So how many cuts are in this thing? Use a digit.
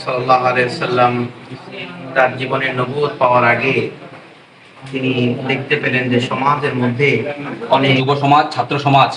1